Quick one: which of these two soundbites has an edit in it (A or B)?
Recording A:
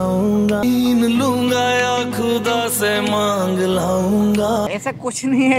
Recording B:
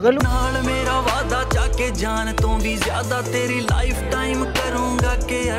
A